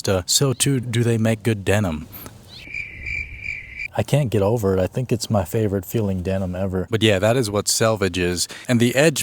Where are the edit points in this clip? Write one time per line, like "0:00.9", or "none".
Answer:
0:03.7
0:06.9